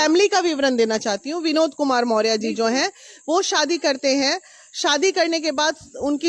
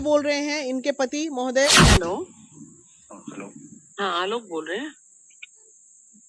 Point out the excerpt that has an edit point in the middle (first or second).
second